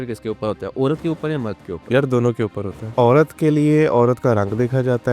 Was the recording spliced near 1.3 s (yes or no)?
no